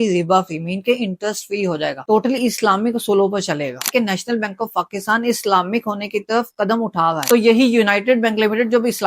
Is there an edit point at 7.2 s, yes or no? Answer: yes